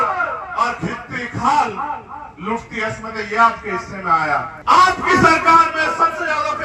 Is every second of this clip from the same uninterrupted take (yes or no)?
no